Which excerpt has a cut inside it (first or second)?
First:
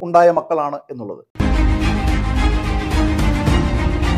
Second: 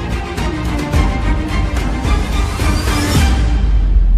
first